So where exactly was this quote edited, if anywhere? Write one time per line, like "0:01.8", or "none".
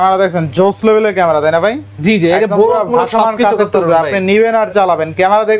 none